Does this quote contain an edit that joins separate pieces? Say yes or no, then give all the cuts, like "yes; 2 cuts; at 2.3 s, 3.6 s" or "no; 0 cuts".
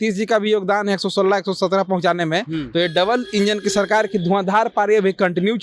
no; 0 cuts